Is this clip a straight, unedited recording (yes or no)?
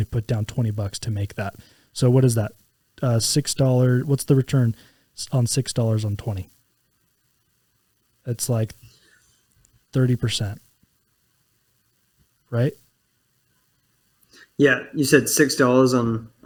yes